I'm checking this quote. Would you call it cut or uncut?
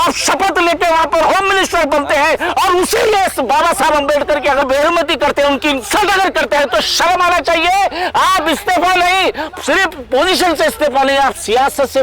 cut